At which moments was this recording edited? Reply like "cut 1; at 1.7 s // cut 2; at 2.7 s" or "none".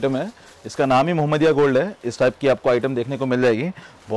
none